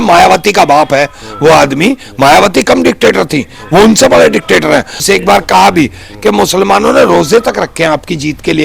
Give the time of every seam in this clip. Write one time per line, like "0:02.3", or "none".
0:05.0